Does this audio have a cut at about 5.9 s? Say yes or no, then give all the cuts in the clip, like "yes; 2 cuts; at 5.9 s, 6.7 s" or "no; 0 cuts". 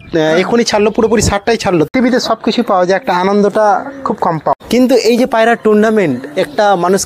no; 2 cuts; at 1.9 s, 4.5 s